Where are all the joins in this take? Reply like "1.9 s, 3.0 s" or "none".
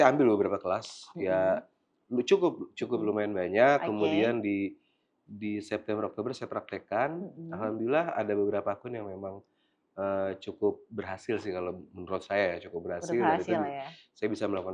none